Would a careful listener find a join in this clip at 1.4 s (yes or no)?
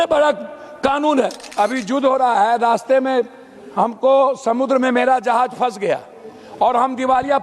yes